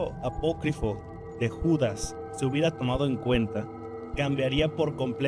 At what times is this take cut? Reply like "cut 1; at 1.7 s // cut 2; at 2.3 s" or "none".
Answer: none